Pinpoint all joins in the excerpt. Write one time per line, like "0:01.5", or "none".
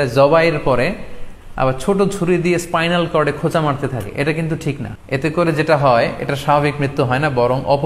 0:04.9

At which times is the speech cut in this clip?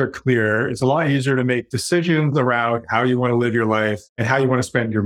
0:04.1

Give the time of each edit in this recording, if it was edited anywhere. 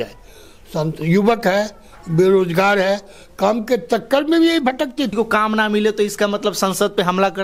0:05.1

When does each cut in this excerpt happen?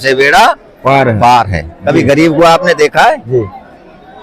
0:01.7

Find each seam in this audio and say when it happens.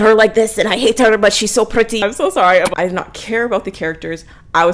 0:02.7

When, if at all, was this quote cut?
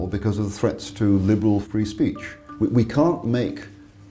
0:02.2

